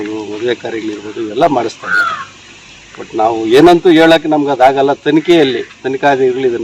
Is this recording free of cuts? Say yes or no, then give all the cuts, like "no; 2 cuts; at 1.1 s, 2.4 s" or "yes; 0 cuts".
yes; 0 cuts